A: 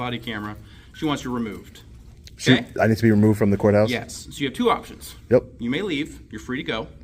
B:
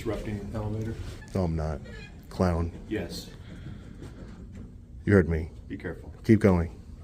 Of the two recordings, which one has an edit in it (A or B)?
B